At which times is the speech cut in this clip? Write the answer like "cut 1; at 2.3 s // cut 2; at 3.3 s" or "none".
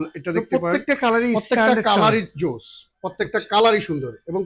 none